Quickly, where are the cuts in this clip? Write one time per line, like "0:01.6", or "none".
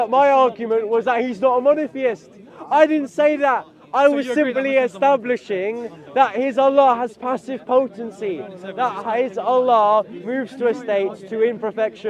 none